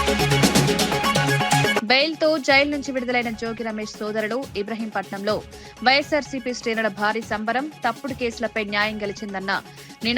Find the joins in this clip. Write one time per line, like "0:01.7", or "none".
0:01.8